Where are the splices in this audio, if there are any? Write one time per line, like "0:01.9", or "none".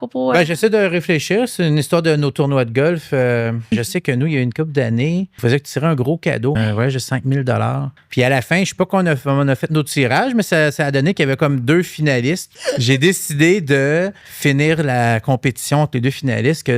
0:03.6
0:05.3
0:06.6
0:07.9
0:12.5
0:14.2